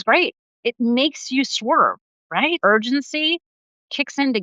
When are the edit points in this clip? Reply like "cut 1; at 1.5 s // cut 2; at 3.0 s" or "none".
cut 1; at 2.6 s